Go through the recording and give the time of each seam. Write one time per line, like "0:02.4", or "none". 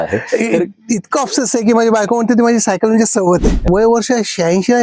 0:03.7

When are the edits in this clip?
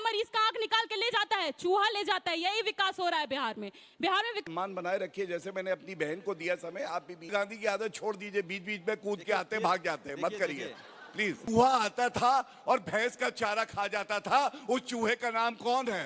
0:04.4
0:07.3
0:11.5

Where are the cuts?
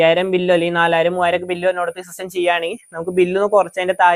none

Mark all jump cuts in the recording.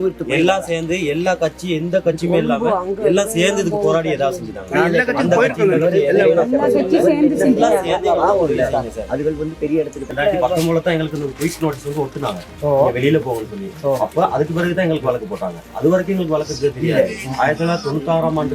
0:10.1

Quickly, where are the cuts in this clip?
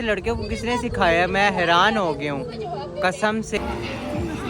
0:03.6

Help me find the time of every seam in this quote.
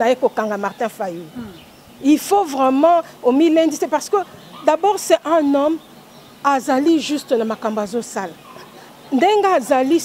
none

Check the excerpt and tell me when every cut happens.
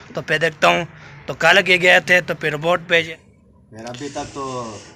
0:03.1

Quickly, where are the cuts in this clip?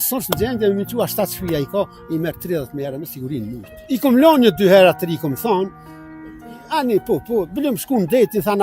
0:03.8

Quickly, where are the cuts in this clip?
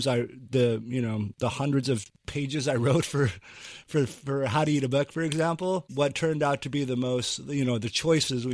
0:05.9

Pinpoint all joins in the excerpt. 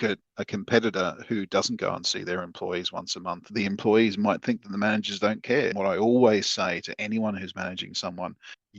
0:03.4

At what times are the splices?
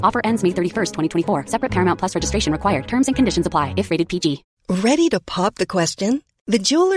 0:04.5

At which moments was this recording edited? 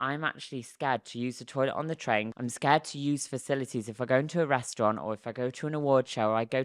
0:02.3

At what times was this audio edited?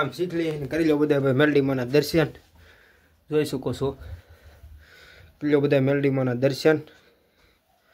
none

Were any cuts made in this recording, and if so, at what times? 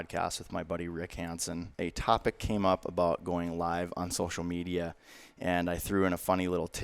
0:01.7

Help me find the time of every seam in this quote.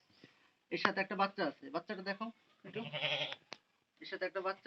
none

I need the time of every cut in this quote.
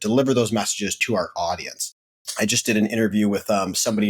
0:01.0
0:02.3

